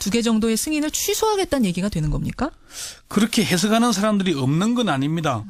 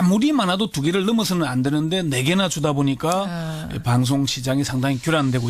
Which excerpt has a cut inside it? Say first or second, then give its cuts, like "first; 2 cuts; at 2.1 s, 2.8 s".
second; 1 cut; at 3.6 s